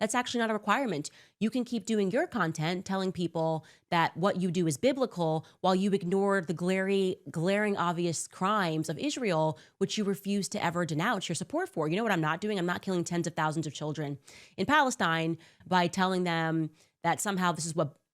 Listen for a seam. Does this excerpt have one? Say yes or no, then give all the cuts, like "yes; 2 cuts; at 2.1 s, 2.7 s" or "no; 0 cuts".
yes; 1 cut; at 15.5 s